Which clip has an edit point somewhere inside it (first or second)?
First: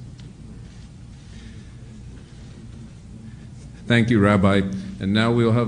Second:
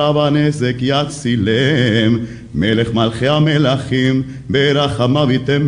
second